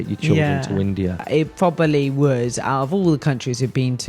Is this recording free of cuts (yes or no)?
no